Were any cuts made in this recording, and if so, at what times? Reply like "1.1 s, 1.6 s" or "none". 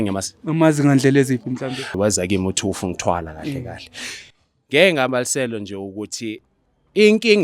1.9 s